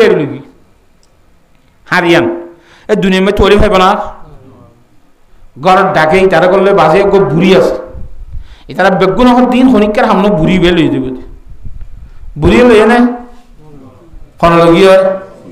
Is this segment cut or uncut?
uncut